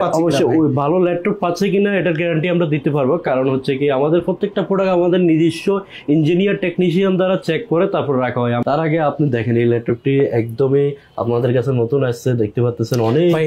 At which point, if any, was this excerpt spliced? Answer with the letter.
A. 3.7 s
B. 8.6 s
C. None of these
B